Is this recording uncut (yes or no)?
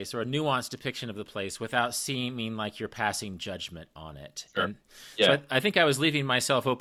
yes